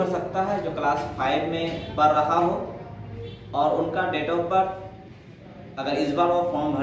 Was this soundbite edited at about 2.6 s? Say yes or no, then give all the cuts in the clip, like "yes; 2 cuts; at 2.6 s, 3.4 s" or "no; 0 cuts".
no; 0 cuts